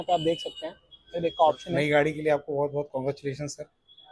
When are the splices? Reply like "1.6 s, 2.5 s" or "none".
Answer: 1.7 s